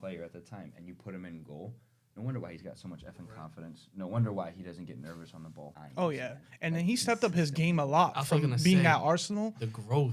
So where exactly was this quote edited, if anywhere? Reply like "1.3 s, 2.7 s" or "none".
5.8 s